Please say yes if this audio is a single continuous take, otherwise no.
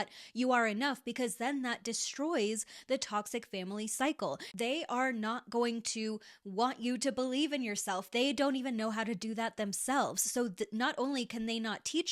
no